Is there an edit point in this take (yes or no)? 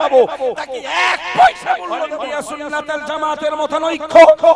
yes